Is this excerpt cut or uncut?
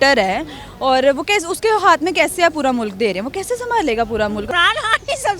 cut